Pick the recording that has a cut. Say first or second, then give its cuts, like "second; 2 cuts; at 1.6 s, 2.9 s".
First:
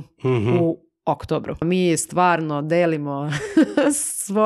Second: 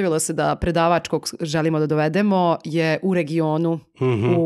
first; 1 cut; at 1.6 s